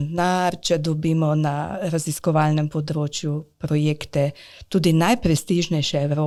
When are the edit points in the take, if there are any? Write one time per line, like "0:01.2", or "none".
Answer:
none